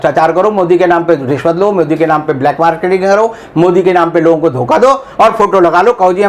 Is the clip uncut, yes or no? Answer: yes